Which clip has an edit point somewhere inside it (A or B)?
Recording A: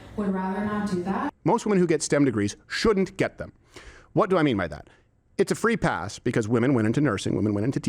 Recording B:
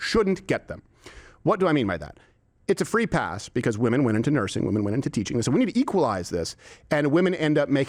A